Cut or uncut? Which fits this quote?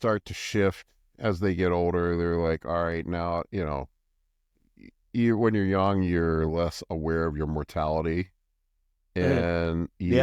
uncut